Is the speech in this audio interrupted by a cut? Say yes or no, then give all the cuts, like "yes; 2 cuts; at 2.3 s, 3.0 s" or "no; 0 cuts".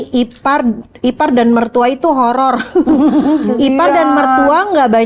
no; 0 cuts